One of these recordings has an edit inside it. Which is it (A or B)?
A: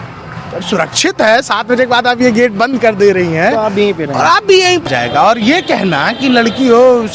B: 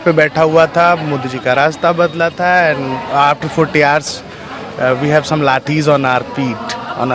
A